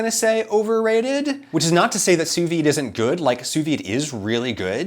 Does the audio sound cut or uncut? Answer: cut